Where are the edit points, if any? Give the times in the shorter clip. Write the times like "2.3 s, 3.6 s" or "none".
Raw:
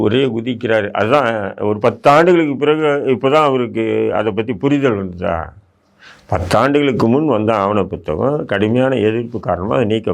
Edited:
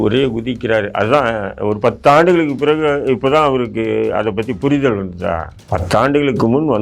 5.5 s